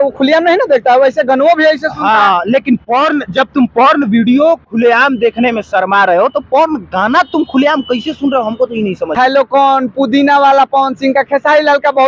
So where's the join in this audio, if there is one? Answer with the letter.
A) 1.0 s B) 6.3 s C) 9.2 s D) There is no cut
C